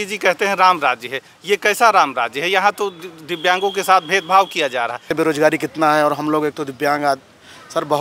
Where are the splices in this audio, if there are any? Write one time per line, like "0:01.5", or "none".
0:05.0